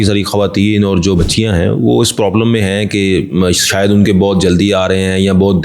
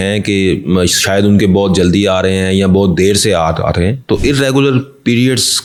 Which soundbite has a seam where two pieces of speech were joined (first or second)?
first